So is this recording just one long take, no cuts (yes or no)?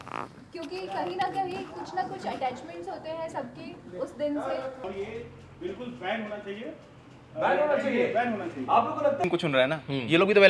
no